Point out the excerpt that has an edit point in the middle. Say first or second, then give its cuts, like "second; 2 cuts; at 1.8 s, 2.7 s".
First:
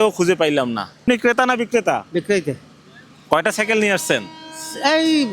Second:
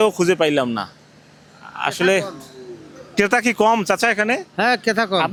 first; 1 cut; at 1.0 s